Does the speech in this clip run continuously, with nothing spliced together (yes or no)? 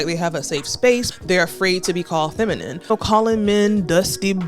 no